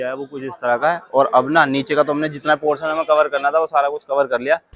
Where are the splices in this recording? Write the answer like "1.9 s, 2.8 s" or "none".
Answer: none